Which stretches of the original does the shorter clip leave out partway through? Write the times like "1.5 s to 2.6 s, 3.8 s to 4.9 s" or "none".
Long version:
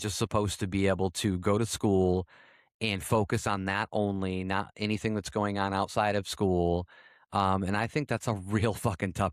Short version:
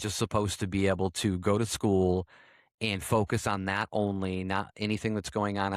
none